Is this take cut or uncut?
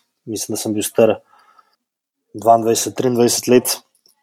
uncut